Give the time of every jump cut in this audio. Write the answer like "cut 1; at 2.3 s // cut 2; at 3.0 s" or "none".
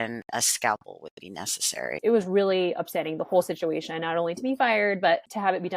cut 1; at 2.0 s